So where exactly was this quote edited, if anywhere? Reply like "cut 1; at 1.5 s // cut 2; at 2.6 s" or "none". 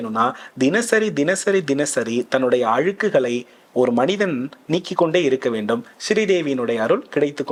none